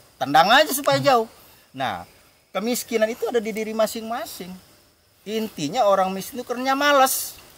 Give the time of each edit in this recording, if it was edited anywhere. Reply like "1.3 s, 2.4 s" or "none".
none